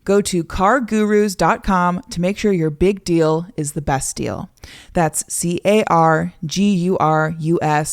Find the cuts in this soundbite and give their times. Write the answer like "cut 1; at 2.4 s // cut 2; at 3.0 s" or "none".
none